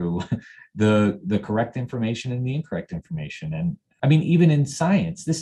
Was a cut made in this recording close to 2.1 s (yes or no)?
no